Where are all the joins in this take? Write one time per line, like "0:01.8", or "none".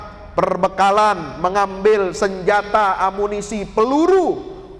none

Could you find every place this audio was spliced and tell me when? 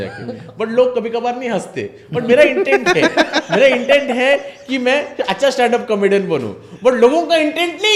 none

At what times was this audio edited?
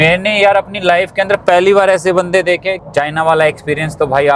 0:02.8

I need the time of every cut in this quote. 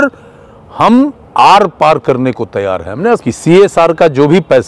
0:03.2

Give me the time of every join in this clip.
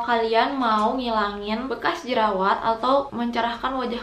0:01.7
0:03.1

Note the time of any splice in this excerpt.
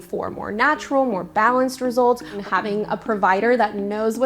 0:02.4

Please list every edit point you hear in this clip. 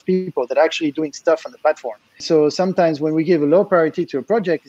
0:02.2

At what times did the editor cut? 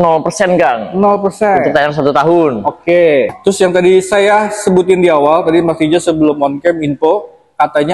0:03.3

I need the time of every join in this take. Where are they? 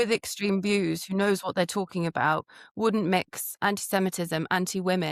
none

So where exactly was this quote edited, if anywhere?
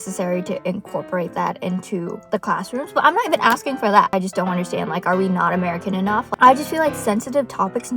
0:04.1
0:06.3

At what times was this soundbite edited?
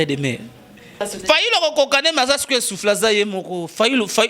0:01.0

